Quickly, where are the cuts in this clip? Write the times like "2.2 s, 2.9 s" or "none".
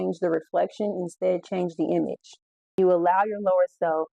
2.8 s